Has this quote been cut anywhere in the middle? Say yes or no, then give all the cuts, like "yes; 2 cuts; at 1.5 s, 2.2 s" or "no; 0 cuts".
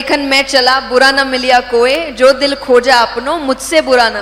no; 0 cuts